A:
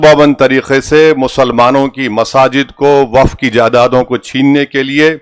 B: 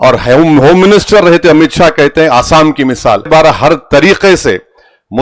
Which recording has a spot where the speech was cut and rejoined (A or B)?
B